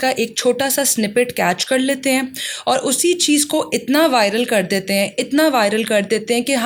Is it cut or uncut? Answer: uncut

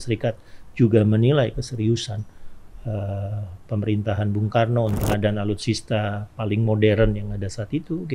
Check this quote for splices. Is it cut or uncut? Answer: cut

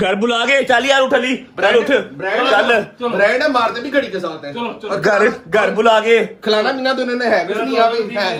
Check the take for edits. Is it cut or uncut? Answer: uncut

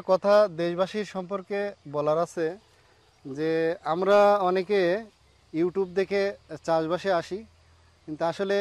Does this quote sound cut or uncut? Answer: uncut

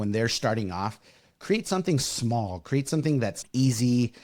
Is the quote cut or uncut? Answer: uncut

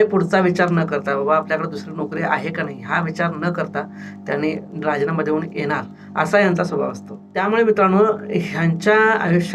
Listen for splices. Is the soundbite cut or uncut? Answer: cut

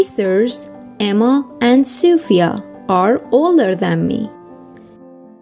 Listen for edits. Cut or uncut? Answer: cut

